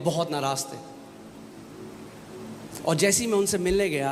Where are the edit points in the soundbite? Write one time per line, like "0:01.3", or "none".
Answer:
none